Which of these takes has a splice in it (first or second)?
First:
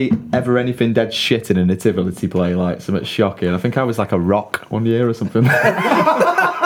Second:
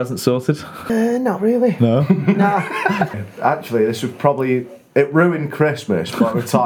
second